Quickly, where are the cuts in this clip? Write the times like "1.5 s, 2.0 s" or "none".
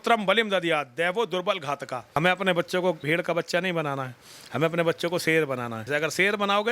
2.2 s, 3.0 s, 5.9 s